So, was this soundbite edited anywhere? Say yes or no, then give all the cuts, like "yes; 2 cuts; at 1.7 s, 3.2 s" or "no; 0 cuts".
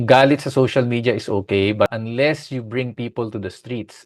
yes; 1 cut; at 1.9 s